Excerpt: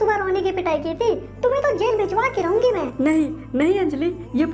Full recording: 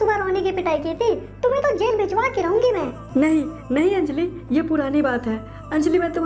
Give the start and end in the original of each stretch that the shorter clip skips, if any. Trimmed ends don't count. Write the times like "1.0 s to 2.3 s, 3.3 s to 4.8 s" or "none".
2.9 s to 3.1 s